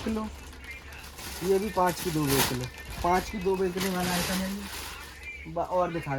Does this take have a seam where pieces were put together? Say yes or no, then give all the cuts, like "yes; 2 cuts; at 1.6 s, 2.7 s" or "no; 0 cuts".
no; 0 cuts